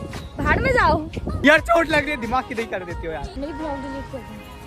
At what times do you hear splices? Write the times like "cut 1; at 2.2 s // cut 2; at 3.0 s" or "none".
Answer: cut 1; at 1.4 s // cut 2; at 3.4 s